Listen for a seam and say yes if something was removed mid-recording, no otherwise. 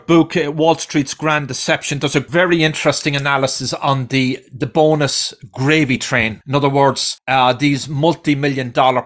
yes